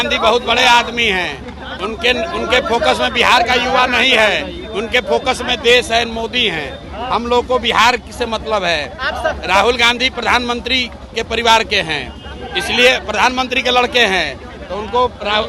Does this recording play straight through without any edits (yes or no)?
yes